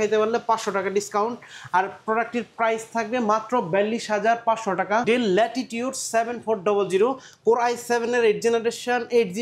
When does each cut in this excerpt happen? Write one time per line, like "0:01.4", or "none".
0:05.0